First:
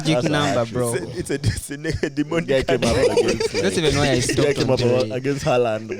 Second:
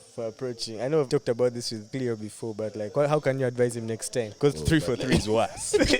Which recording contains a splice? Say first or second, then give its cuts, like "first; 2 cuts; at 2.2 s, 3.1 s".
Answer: second; 3 cuts; at 1.1 s, 1.9 s, 4.3 s